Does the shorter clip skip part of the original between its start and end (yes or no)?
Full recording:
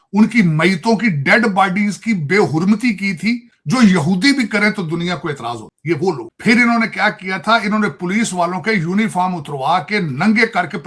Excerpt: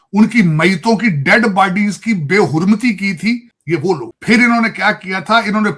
yes